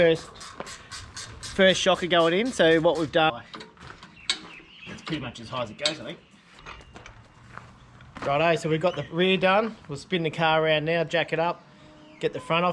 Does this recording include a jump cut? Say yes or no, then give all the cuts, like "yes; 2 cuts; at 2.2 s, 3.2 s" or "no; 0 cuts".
yes; 2 cuts; at 3.3 s, 6.5 s